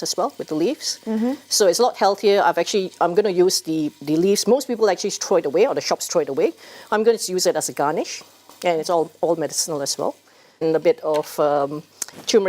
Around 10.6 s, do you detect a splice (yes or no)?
yes